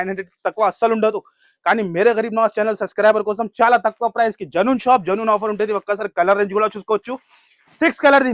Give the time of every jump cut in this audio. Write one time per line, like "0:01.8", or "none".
none

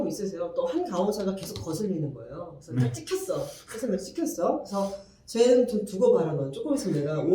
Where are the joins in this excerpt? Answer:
none

